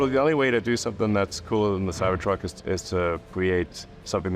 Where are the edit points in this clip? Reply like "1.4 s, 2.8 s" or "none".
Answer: 3.3 s